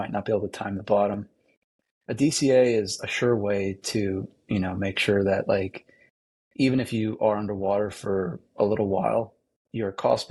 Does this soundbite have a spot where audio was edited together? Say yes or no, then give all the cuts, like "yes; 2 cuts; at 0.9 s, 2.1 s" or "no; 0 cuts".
no; 0 cuts